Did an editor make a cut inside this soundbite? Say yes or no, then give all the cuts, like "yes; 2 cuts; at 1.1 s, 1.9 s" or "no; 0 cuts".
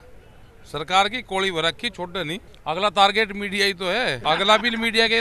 yes; 2 cuts; at 2.5 s, 4.2 s